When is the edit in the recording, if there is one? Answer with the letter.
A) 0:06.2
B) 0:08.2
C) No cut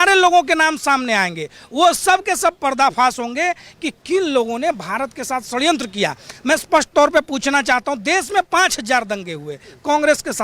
C